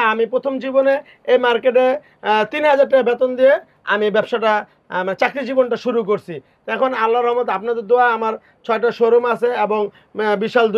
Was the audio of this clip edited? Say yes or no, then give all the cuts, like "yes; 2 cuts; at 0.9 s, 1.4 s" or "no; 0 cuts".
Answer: no; 0 cuts